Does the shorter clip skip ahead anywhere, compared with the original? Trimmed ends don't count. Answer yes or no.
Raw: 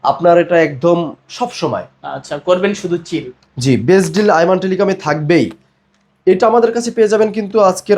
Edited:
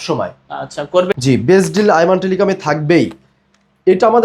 yes